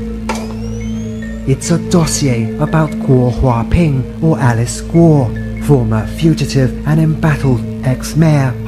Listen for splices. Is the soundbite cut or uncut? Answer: uncut